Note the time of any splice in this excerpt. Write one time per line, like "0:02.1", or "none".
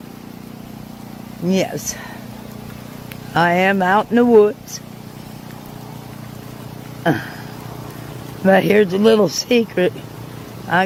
none